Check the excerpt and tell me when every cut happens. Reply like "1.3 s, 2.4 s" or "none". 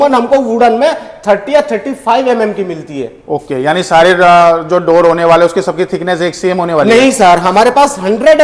none